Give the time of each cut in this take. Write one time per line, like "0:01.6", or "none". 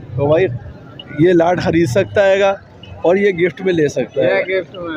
none